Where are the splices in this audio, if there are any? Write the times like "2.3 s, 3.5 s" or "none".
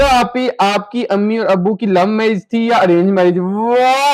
none